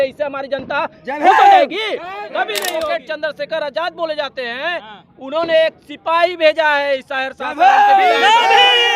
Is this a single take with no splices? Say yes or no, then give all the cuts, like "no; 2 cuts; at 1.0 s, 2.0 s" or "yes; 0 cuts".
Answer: no; 1 cut; at 2.7 s